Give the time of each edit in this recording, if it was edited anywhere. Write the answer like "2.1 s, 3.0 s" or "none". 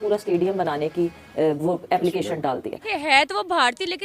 2.8 s